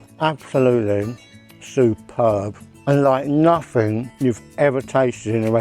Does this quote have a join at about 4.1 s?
yes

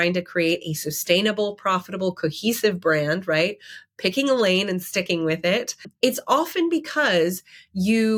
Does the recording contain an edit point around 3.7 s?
no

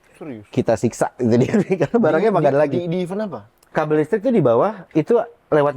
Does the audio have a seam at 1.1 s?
no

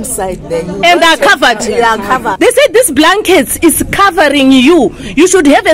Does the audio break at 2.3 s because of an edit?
yes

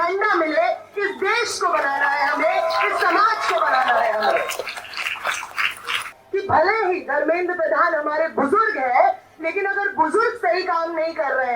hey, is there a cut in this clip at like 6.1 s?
yes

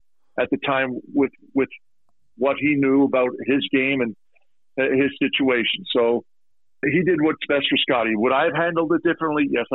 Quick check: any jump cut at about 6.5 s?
no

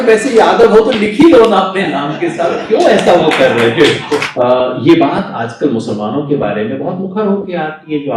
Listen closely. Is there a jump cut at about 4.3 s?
yes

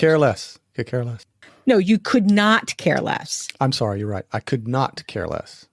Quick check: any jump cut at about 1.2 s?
yes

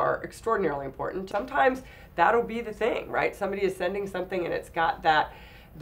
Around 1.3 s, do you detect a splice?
yes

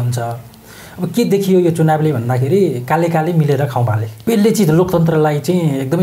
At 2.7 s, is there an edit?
no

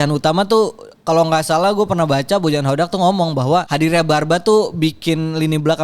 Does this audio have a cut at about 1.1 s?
no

